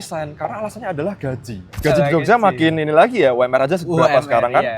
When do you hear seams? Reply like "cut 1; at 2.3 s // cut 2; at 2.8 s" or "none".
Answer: cut 1; at 1.7 s